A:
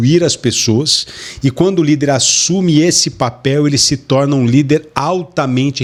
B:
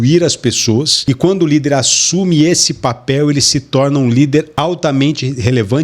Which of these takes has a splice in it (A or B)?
B